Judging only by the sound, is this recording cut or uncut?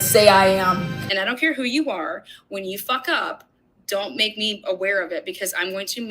cut